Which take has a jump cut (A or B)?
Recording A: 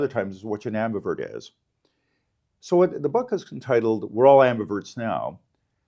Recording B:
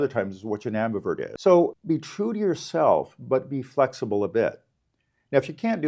B